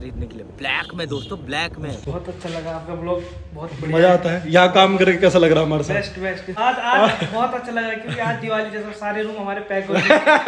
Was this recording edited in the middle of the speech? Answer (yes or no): yes